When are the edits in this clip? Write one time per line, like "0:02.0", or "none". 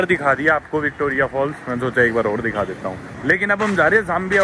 0:03.1